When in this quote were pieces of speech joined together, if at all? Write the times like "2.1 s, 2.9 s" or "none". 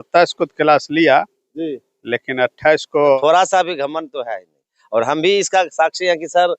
3.0 s